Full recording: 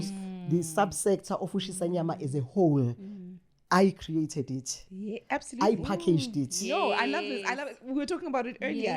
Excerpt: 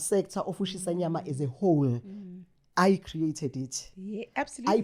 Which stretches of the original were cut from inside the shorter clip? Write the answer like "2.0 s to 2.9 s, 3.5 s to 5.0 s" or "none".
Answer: none